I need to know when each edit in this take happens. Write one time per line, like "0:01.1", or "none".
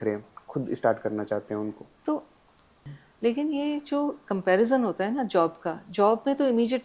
0:02.9